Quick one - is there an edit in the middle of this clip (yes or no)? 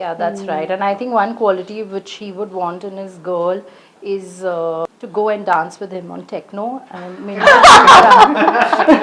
yes